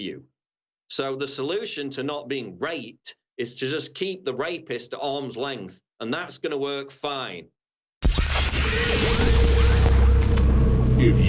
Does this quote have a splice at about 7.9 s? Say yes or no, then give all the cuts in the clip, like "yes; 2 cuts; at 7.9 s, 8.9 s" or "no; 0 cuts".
yes; 1 cut; at 7.9 s